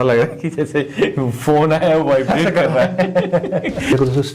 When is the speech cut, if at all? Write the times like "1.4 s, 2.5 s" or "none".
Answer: 3.4 s